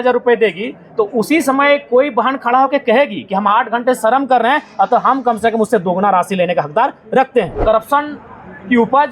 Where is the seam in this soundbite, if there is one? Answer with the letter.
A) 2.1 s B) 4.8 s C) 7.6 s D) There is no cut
C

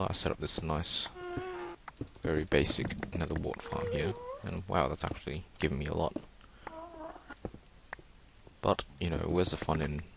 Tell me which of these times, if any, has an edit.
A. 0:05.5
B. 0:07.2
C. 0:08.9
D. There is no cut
C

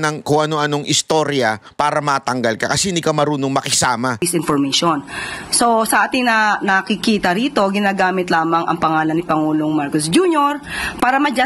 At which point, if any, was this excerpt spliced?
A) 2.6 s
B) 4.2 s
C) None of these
B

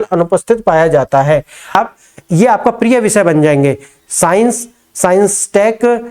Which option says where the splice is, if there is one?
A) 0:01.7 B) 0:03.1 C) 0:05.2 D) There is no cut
A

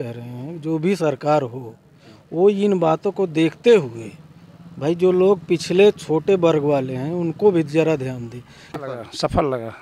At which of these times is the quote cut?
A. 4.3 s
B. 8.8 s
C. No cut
B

